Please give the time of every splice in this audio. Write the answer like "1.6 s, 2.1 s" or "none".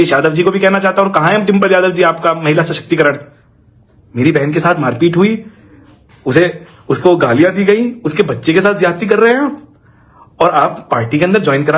none